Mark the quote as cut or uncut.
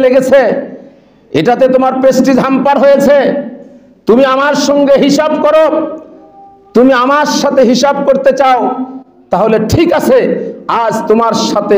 uncut